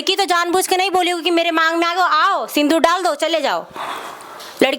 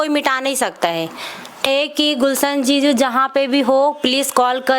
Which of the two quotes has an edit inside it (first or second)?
second